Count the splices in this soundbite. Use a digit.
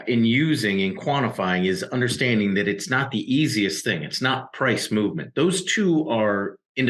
0